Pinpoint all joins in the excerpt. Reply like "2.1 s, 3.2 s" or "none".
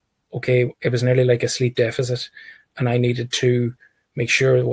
none